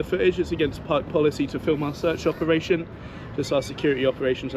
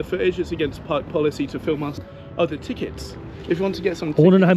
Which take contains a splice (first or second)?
second